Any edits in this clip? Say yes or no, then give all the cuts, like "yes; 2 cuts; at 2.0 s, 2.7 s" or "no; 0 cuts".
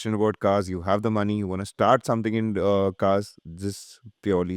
no; 0 cuts